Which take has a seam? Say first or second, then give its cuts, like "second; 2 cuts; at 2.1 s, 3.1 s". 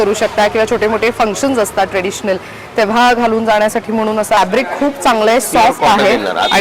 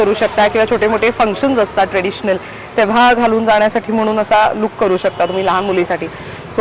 first; 1 cut; at 4.4 s